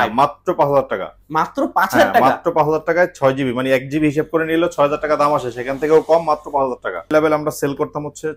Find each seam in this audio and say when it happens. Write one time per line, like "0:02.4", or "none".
0:07.1